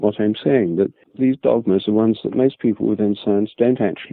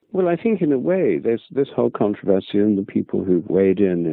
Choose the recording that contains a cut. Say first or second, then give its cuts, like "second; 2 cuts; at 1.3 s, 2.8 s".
first; 1 cut; at 1.0 s